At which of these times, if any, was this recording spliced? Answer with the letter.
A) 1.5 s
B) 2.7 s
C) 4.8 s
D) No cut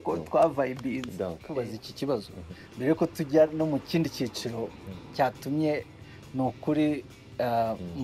A